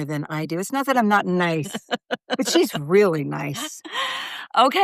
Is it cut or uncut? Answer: uncut